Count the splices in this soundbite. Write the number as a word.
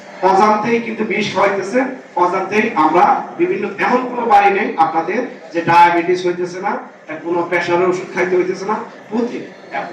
zero